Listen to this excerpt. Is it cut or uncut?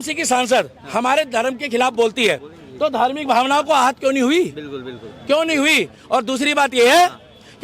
uncut